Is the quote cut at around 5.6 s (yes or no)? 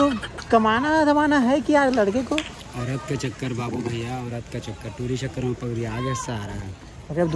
no